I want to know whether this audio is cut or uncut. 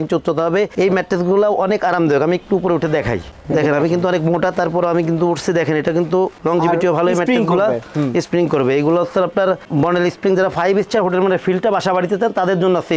uncut